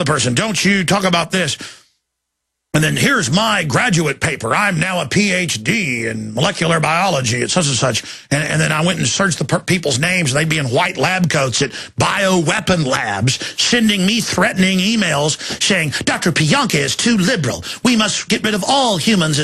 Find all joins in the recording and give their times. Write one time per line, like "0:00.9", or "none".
0:18.4